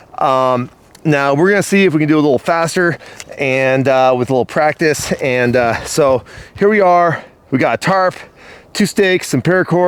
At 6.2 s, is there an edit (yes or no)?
no